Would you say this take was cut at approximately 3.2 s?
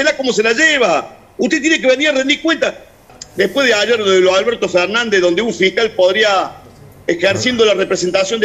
yes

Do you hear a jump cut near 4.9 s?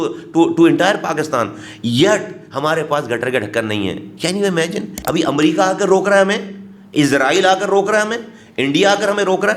yes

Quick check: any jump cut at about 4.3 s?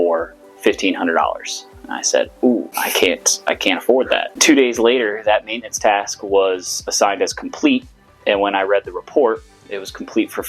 yes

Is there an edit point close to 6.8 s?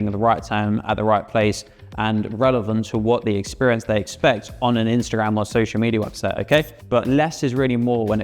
yes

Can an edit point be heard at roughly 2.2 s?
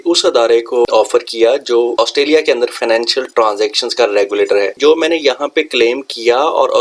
no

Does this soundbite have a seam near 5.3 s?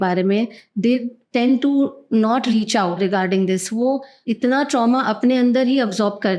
no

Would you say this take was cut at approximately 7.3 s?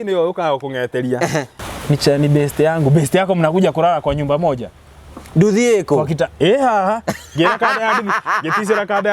no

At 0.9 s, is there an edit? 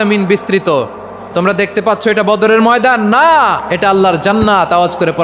no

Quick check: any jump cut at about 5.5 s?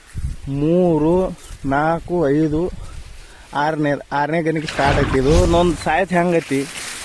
yes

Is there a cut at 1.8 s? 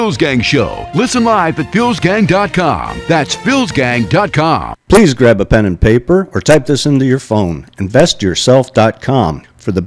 no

